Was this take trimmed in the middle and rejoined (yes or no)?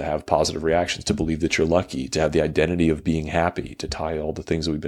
no